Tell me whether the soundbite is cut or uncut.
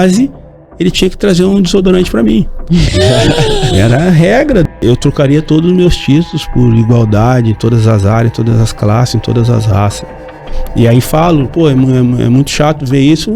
cut